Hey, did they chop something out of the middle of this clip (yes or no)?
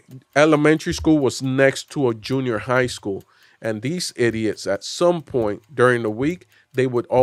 no